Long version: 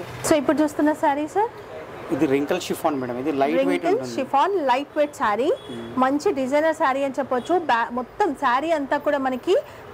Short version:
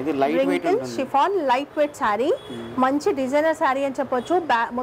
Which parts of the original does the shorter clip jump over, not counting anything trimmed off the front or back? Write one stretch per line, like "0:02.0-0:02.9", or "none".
none